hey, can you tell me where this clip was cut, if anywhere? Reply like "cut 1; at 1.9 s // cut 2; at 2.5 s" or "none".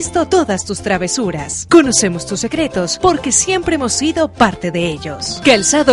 none